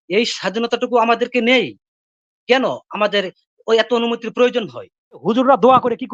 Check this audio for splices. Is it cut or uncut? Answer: cut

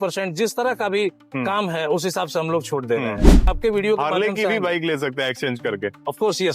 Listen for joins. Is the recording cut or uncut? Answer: cut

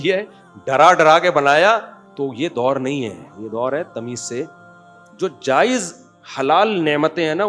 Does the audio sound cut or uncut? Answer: cut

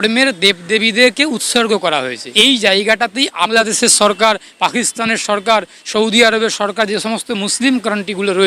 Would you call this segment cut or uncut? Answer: cut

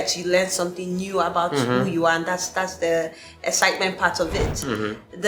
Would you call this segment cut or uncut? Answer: uncut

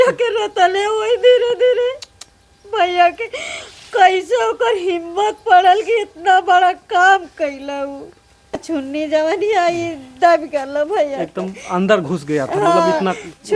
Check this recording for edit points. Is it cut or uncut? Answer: cut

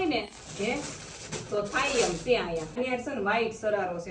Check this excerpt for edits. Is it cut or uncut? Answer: cut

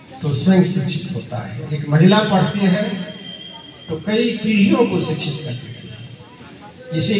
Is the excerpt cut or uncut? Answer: uncut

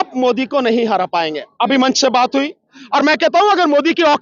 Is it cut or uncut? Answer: cut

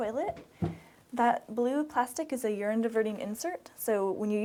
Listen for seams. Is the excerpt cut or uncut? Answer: uncut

